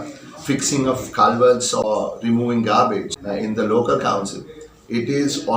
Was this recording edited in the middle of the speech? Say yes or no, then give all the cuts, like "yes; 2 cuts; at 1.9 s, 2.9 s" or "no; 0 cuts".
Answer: yes; 2 cuts; at 1.8 s, 3.2 s